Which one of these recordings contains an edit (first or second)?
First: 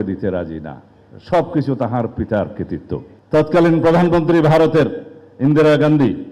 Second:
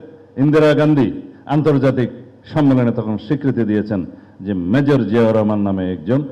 first